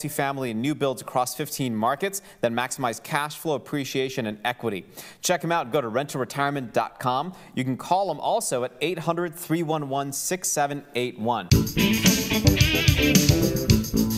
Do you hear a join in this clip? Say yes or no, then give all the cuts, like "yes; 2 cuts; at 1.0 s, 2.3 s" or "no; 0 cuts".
yes; 1 cut; at 11.4 s